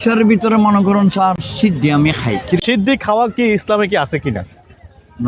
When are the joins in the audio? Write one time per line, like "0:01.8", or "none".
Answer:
0:01.5
0:02.6